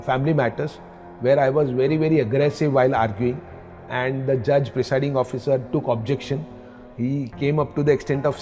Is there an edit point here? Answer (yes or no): no